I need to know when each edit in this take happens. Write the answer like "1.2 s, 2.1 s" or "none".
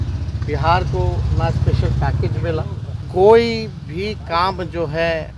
2.9 s